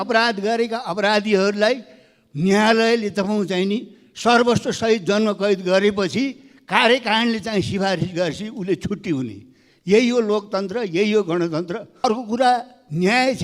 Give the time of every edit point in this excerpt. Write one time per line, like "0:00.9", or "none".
0:12.0